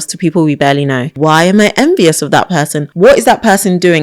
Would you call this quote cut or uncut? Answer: cut